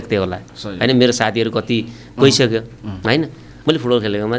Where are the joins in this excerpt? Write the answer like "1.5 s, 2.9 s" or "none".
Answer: 3.4 s